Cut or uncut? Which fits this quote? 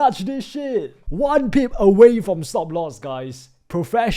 cut